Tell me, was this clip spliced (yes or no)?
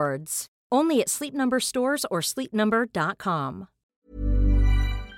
yes